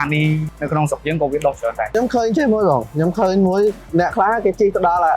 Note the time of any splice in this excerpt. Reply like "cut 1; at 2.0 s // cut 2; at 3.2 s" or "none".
cut 1; at 1.9 s